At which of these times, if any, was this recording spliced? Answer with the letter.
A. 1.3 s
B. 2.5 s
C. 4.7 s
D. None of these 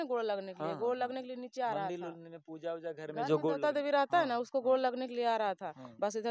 D